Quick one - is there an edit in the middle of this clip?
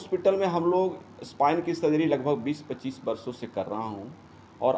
no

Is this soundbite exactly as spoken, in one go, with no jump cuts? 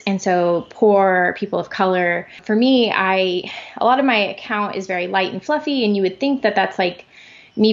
no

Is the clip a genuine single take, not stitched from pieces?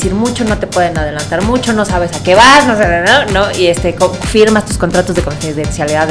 yes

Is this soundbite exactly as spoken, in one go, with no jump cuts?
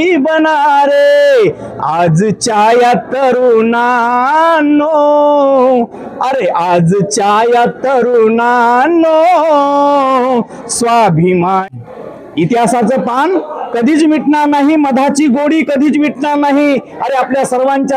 no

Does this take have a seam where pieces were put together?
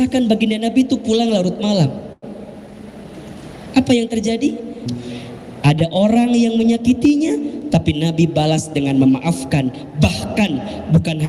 yes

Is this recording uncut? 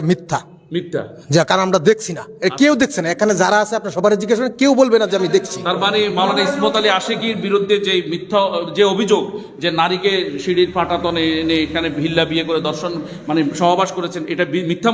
yes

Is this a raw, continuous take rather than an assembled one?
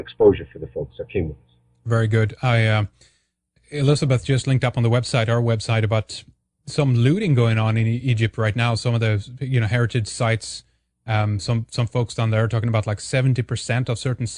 no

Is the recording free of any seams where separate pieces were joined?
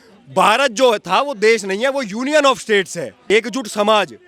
no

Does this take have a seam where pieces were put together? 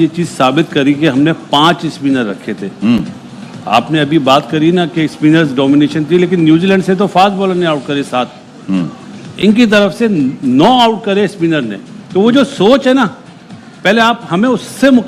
no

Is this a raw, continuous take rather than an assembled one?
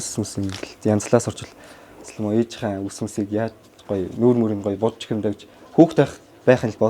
yes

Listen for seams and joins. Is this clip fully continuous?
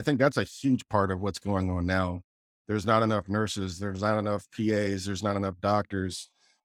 yes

